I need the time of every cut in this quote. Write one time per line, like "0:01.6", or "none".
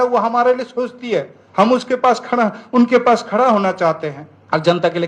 0:01.4